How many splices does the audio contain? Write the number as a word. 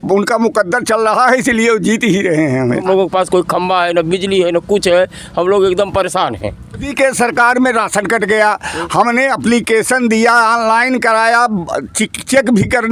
two